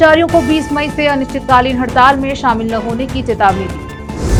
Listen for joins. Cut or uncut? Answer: uncut